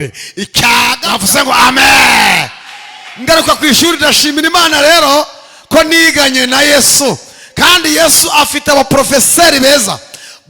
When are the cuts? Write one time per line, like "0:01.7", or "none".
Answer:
0:01.0